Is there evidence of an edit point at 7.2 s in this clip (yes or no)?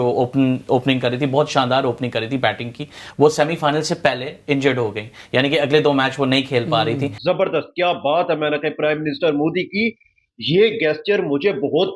yes